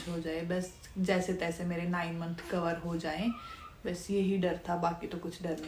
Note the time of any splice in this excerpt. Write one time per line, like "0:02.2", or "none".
none